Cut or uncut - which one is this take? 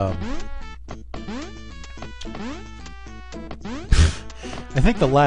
cut